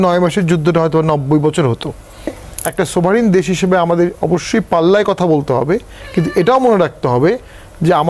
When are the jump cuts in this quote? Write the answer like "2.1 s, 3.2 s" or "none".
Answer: 2.4 s